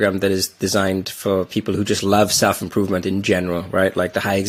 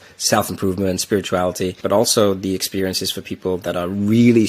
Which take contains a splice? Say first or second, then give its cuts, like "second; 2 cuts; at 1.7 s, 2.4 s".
second; 1 cut; at 1.8 s